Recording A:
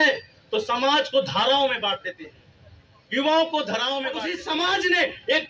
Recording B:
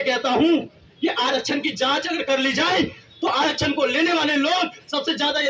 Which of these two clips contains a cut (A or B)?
A